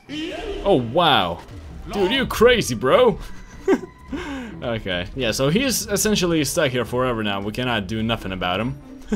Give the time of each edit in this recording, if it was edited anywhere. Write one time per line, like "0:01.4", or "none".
none